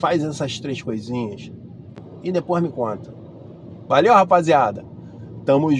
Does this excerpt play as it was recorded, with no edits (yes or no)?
no